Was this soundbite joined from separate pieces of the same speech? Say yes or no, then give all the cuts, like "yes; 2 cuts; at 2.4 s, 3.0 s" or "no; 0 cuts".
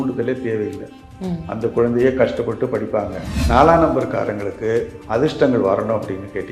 yes; 1 cut; at 3.3 s